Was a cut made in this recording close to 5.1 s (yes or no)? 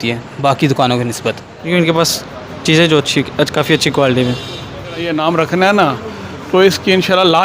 yes